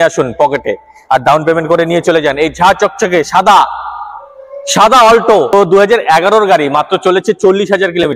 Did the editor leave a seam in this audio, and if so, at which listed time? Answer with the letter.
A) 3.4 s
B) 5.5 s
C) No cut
B